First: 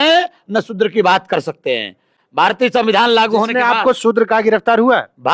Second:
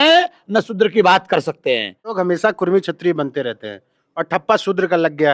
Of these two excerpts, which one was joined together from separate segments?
second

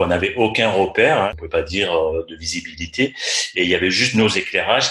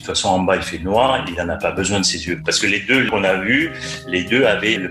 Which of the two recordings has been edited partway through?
first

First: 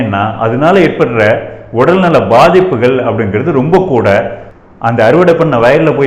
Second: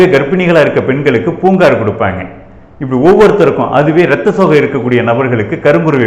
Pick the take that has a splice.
first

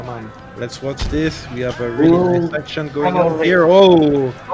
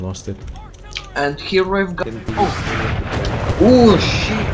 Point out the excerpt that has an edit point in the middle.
second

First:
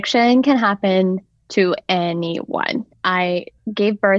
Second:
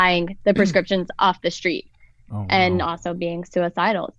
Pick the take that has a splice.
first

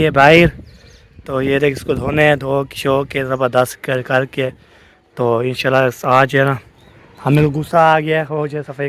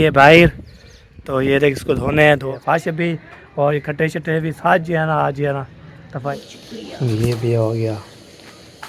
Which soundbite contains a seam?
second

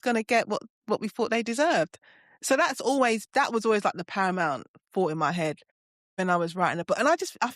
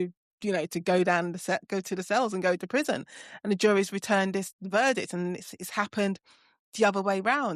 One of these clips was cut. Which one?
first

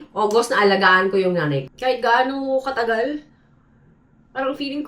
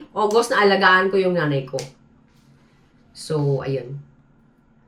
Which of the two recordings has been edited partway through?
first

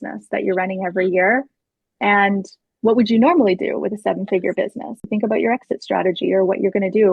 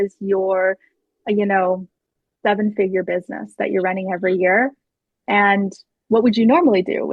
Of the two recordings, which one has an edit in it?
first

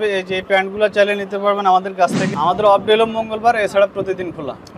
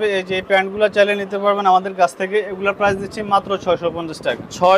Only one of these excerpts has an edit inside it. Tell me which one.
first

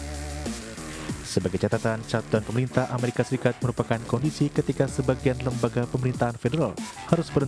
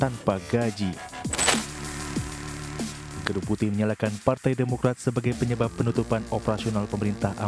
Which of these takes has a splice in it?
second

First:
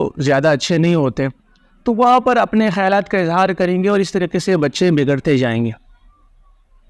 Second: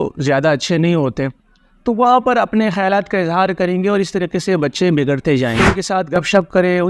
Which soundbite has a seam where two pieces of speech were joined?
second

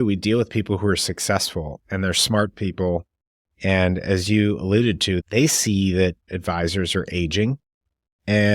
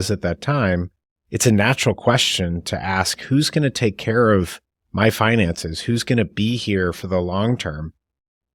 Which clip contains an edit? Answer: first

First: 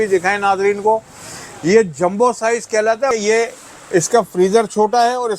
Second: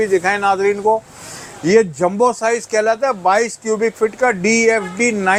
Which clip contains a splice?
first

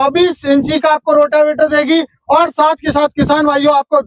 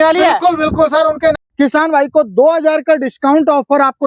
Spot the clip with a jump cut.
second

